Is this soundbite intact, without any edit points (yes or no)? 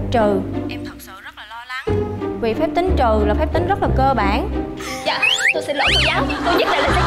yes